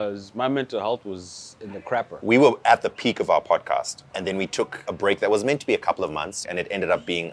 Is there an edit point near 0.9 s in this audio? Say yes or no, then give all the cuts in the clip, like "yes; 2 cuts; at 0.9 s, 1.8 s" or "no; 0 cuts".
no; 3 cuts; at 2.1 s, 4.4 s, 6.4 s